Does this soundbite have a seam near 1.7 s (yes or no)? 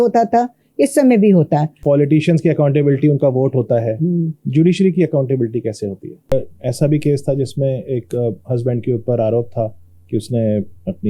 yes